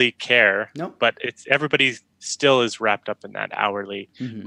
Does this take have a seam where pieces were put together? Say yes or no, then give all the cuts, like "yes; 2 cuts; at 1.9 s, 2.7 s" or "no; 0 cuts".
no; 0 cuts